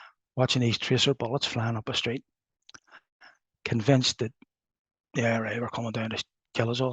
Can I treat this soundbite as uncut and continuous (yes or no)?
yes